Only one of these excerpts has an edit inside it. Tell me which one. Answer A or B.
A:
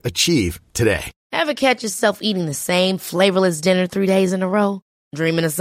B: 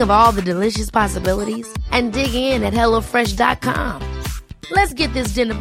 A